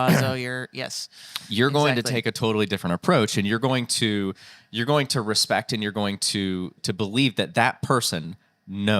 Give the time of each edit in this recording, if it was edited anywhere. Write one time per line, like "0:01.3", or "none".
0:06.8